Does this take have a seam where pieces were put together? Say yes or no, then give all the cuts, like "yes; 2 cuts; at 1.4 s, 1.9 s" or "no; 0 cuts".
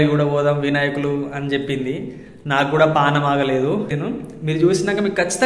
yes; 1 cut; at 3.9 s